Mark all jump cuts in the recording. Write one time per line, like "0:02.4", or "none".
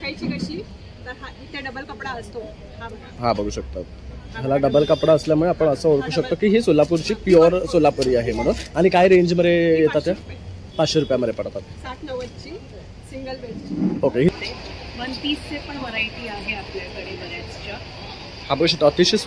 0:14.3

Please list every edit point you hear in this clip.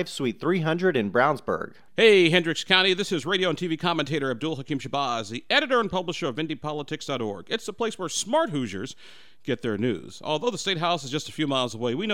0:01.8

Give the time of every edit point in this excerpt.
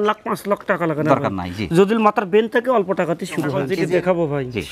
0:03.6

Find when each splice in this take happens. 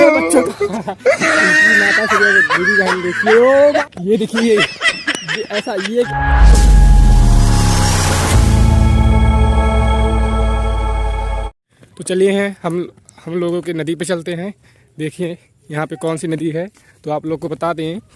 0:03.8
0:06.1
0:11.5

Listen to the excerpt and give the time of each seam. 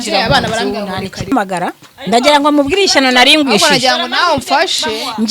0:01.3

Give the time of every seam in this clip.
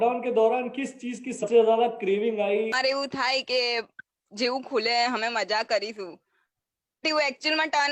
0:01.4
0:02.9

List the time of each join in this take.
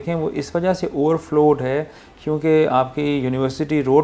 none

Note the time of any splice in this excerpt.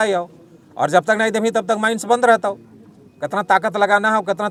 none

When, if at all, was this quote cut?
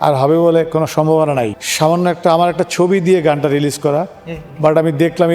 0:01.6

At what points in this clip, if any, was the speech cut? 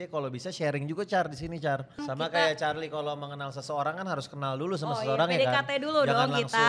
0:02.0

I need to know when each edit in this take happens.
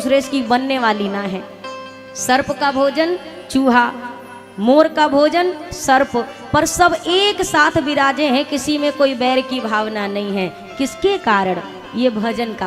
none

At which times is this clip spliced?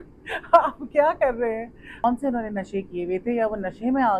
0:02.0

